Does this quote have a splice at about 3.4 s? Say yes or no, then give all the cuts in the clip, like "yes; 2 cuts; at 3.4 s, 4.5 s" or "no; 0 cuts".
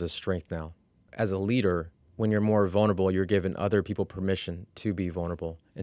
no; 2 cuts; at 1.1 s, 2.0 s